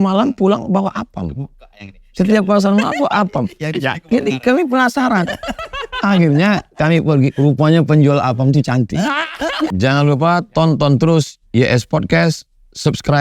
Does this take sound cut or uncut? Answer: cut